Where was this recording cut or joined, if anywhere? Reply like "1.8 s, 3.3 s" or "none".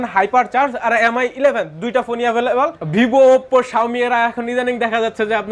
2.8 s